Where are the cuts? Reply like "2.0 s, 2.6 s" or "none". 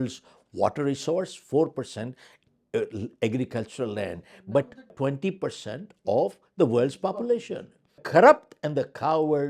4.9 s, 8.0 s